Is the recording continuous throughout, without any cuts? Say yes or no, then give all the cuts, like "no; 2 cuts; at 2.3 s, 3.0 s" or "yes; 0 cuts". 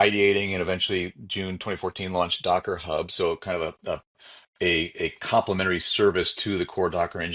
yes; 0 cuts